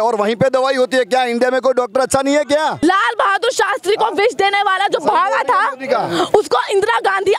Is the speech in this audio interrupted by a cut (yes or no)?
yes